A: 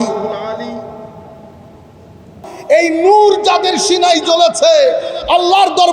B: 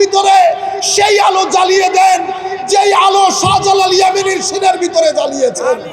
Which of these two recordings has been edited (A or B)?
A